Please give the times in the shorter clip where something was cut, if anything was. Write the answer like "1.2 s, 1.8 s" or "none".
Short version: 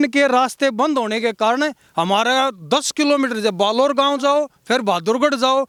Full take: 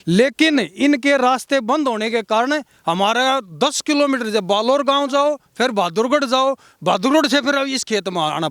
none